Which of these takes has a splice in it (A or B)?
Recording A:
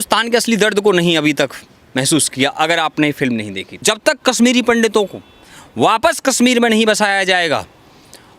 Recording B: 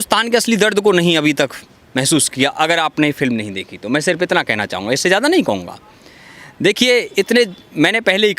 A